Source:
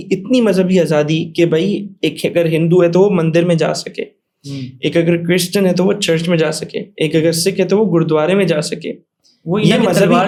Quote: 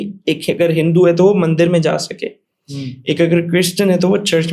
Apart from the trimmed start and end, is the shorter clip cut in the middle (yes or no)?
no